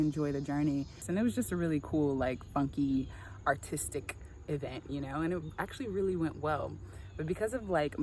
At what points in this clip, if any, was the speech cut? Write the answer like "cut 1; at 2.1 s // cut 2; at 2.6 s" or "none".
cut 1; at 1.1 s